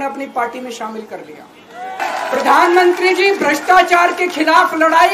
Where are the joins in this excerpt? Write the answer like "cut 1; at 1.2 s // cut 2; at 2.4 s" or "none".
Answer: cut 1; at 2.0 s